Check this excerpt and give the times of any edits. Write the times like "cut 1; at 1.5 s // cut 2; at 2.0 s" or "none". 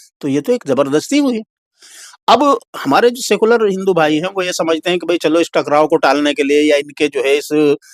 none